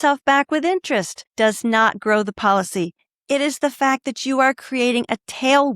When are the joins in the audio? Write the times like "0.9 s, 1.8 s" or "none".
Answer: 3.0 s